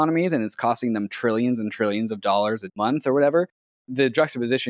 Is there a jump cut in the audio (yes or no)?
yes